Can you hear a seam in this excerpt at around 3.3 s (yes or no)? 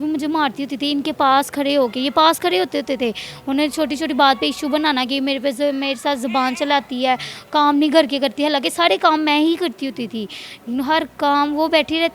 no